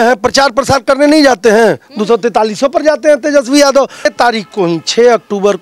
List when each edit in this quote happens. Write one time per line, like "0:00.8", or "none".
0:04.1